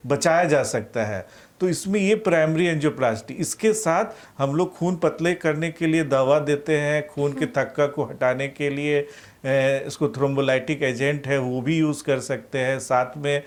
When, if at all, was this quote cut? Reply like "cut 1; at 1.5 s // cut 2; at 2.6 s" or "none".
none